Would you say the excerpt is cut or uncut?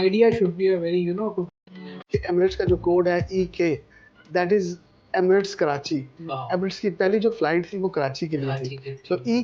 cut